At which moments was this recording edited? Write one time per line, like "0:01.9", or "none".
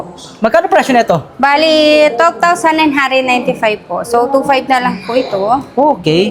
none